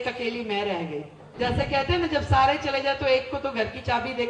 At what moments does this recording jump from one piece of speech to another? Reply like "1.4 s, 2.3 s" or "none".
1.2 s

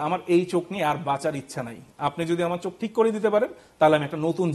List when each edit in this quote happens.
none

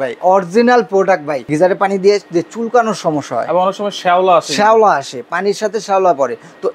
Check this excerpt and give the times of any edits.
1.4 s

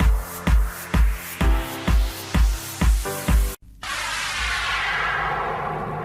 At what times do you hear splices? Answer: 1.2 s

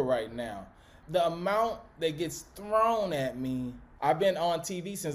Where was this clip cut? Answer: 0.9 s, 3.8 s

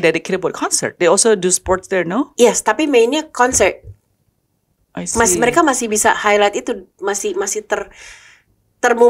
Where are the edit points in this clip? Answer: none

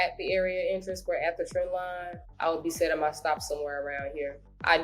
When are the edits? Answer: 2.2 s

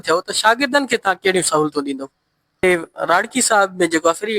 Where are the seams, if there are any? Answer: 2.6 s

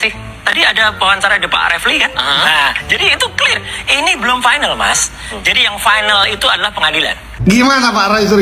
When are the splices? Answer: none

